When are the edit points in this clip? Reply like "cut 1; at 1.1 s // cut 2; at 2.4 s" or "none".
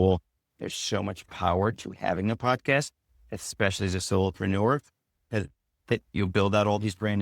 cut 1; at 5.9 s